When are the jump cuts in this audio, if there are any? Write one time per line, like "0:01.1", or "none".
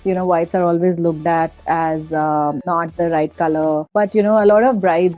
0:02.7
0:03.9